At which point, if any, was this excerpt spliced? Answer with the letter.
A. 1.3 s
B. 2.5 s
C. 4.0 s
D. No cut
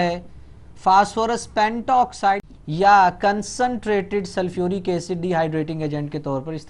B